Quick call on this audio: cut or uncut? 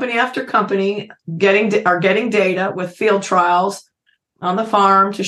uncut